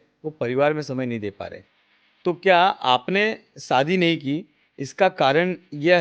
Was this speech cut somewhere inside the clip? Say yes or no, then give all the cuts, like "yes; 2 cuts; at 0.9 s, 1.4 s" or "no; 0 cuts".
no; 0 cuts